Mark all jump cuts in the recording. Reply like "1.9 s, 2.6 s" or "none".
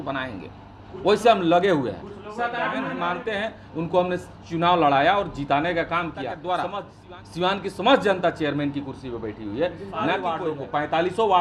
2.9 s, 6.7 s, 10.4 s

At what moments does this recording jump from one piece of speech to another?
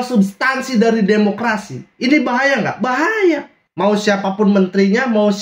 3.6 s

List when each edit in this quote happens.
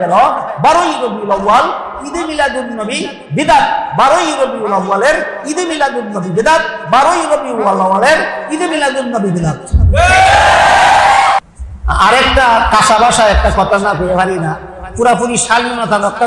11.4 s

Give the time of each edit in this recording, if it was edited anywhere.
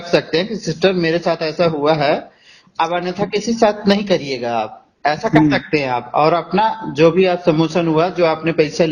none

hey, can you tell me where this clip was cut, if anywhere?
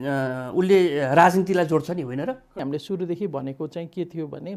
2.5 s

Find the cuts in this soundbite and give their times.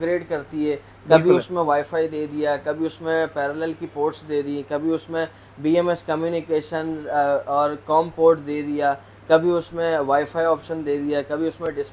none

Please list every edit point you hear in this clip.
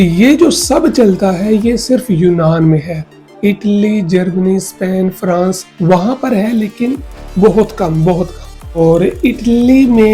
8.8 s

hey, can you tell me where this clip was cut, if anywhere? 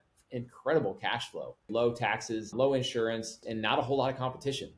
1.7 s, 2.5 s, 3.4 s

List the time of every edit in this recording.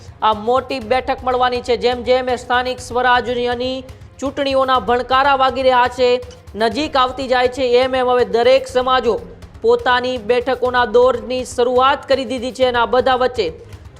none

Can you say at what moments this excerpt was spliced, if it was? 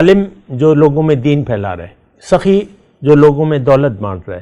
none

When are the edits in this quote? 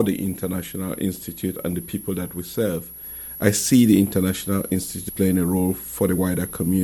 5.0 s

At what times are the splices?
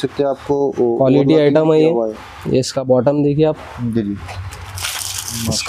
none

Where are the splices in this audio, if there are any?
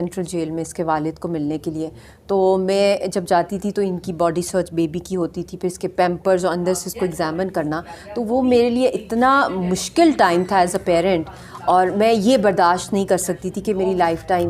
none

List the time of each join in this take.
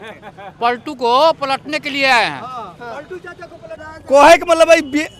3.9 s

